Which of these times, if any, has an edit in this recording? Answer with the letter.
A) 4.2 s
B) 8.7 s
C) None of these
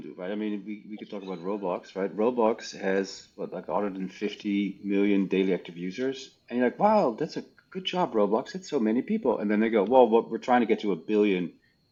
C